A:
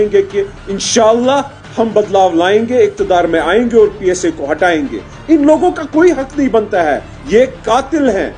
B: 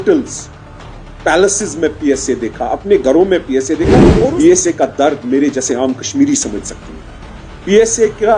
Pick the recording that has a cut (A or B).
B